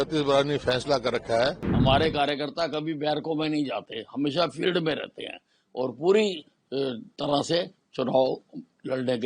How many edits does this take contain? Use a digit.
1